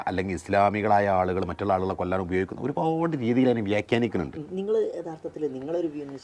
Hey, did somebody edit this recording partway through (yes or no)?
no